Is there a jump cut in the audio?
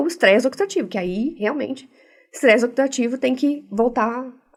no; 0 cuts

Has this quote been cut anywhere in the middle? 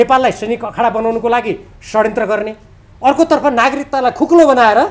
no; 0 cuts

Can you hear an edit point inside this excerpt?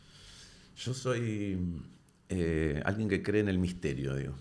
no; 0 cuts

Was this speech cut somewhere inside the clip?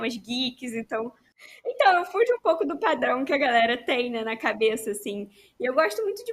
yes; 1 cut; at 1.2 s

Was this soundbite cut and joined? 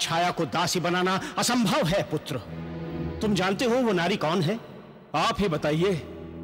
yes; 1 cut; at 3.1 s

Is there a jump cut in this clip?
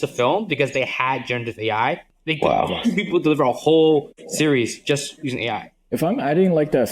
yes; 2 cuts; at 2.1 s, 5.8 s

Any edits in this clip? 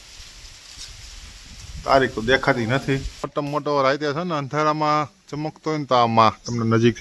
yes; 1 cut; at 3.2 s

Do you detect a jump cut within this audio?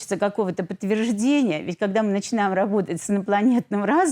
no; 0 cuts

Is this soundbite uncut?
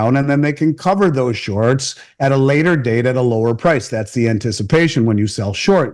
yes; 0 cuts

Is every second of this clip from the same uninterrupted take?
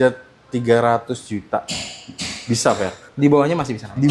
no; 1 cut; at 3.0 s

